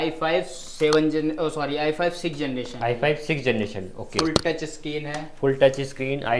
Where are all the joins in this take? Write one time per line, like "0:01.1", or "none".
none